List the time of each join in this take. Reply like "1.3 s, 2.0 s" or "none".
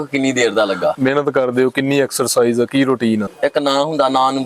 0.9 s, 3.2 s